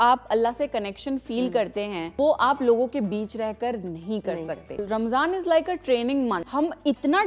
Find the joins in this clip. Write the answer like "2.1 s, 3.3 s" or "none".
2.1 s, 4.8 s, 6.4 s